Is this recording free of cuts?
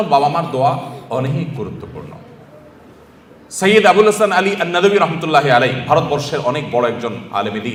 yes; 0 cuts

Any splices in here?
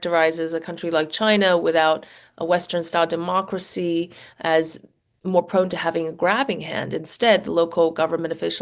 no; 0 cuts

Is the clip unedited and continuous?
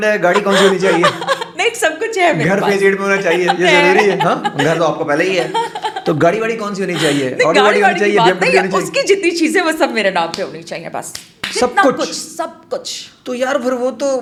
yes; 0 cuts

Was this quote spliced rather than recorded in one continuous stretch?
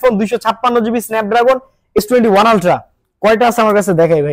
yes; 1 cut; at 2.0 s

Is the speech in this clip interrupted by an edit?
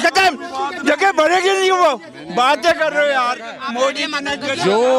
no; 0 cuts

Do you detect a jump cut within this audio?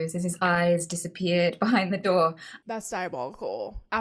yes; 1 cut; at 2.5 s

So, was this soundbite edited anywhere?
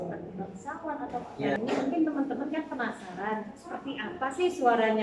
yes; 1 cut; at 1.6 s

